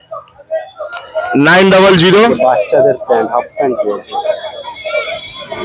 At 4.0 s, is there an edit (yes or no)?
no